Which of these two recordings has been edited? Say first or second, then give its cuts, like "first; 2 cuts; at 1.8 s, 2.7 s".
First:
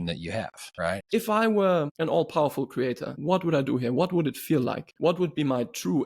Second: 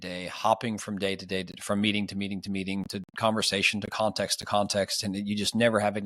first; 4 cuts; at 0.9 s, 1.9 s, 3.1 s, 4.9 s